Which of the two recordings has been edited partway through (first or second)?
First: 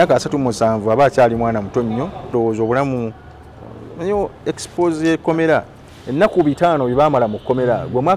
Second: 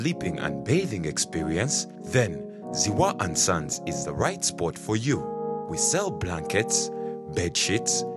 first